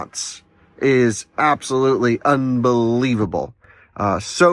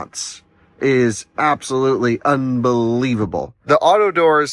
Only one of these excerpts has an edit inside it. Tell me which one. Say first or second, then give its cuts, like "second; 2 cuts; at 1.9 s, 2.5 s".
second; 1 cut; at 3.5 s